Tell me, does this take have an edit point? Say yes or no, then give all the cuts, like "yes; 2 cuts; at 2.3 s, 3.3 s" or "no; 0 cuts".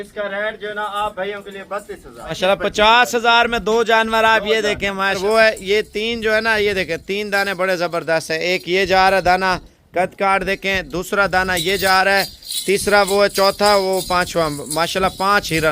yes; 2 cuts; at 2.4 s, 5.2 s